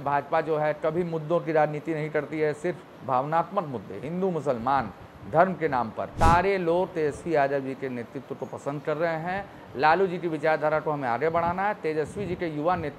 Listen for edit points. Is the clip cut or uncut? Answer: cut